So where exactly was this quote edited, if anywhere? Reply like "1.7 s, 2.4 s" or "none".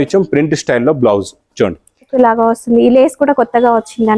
2.1 s